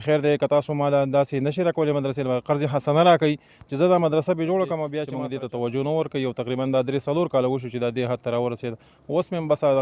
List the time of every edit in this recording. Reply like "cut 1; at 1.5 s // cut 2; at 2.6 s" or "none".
cut 1; at 5.0 s